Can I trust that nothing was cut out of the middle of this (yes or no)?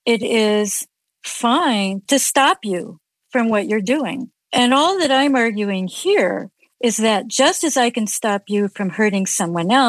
no